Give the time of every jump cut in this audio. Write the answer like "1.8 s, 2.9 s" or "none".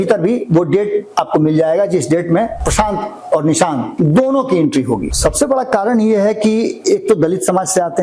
2.6 s, 3.9 s, 5.1 s